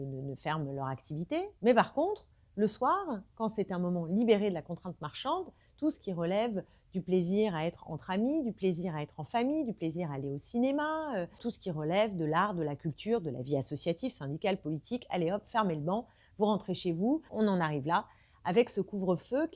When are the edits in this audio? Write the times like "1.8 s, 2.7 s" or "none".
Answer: 1.5 s, 11.4 s, 17.3 s